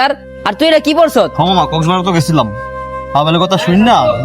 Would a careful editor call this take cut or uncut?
cut